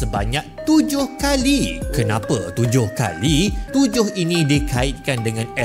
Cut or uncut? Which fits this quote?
cut